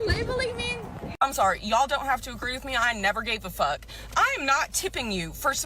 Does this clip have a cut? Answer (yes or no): yes